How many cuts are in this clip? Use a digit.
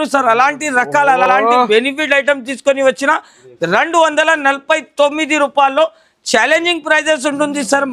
0